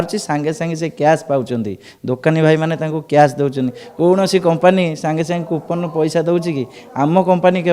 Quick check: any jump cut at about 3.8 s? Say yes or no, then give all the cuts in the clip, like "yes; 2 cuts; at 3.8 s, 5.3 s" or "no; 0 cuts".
yes; 1 cut; at 3.8 s